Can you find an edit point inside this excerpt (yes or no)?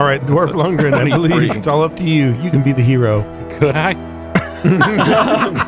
yes